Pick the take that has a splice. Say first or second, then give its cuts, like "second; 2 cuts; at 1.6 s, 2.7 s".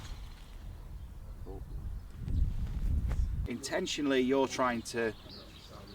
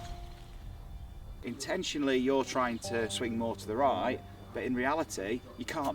second; 2 cuts; at 1.4 s, 3.1 s